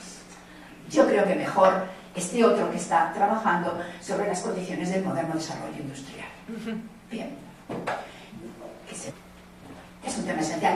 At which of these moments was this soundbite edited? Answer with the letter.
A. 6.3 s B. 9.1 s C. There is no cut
C